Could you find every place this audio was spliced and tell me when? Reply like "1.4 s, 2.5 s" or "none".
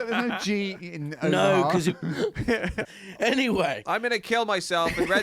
2.9 s